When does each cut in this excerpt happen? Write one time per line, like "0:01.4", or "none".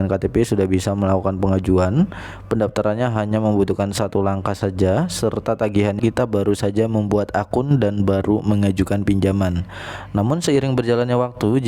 0:06.0